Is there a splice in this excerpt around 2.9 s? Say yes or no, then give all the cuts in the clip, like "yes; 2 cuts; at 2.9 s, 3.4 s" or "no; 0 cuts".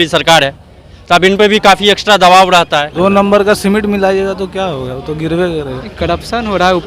yes; 2 cuts; at 2.9 s, 5.8 s